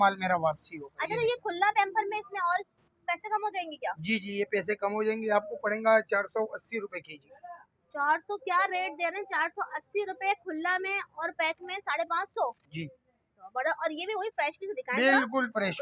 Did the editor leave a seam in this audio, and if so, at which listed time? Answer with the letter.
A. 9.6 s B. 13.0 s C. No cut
C